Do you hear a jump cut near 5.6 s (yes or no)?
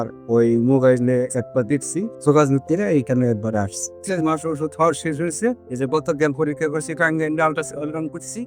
no